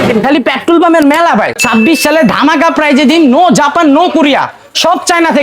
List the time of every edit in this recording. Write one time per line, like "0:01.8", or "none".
0:01.6